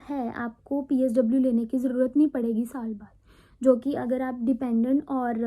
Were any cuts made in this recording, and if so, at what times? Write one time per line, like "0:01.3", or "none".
none

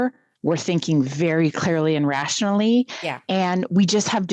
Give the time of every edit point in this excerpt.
none

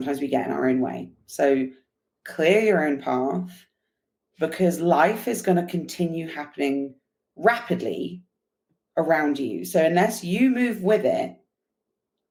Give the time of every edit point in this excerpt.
none

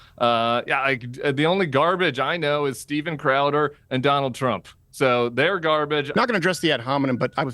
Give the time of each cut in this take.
0:06.1

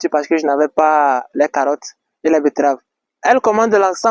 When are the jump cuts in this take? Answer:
0:03.0

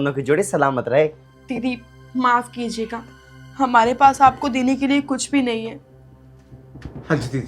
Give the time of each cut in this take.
0:01.3

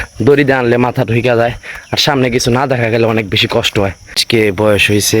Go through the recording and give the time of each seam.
0:04.2

